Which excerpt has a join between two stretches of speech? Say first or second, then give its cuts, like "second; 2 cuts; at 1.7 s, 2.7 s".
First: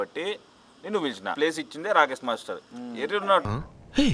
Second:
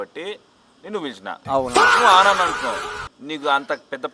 first; 1 cut; at 1.3 s